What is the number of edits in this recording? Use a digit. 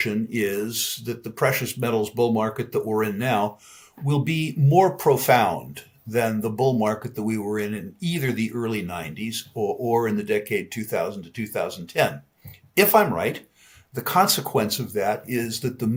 0